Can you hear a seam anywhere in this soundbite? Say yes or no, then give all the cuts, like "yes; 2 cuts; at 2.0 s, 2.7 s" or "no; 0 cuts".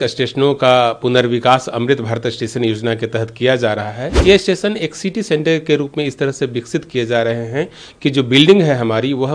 yes; 1 cut; at 4.0 s